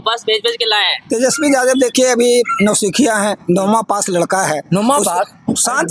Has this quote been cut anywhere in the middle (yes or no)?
no